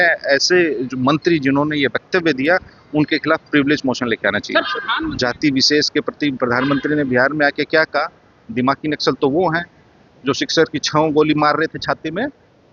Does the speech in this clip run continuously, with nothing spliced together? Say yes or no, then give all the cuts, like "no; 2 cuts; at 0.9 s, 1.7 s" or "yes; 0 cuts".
no; 1 cut; at 5.0 s